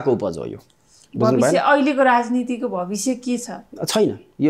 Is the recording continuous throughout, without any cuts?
yes; 0 cuts

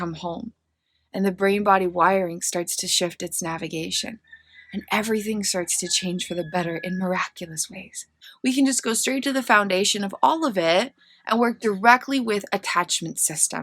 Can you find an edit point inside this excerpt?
yes; 1 cut; at 8.3 s

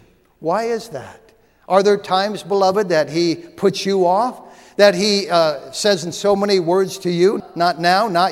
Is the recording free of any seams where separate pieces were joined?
no; 1 cut; at 7.4 s

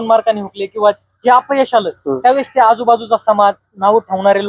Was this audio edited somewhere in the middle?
no; 0 cuts

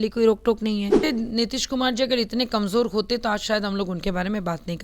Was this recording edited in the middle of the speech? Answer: yes; 1 cut; at 1.0 s

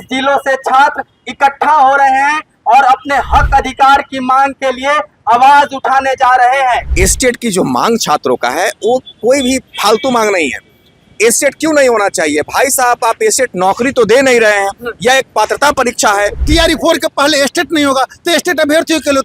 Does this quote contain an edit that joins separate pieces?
yes; 2 cuts; at 6.9 s, 16.4 s

